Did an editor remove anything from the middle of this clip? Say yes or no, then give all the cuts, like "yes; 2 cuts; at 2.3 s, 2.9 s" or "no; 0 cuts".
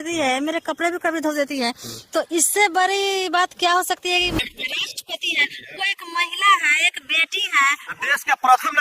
yes; 1 cut; at 4.4 s